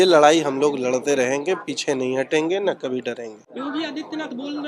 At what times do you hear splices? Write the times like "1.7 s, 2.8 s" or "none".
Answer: none